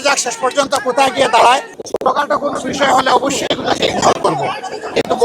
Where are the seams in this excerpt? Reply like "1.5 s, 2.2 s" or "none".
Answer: 1.7 s